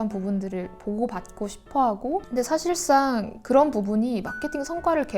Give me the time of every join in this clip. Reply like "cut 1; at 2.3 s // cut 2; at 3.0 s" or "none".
cut 1; at 2.3 s